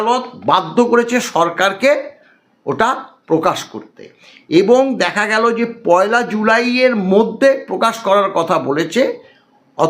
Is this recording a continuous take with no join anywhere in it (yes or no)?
yes